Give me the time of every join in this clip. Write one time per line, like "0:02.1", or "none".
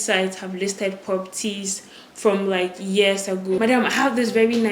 0:03.6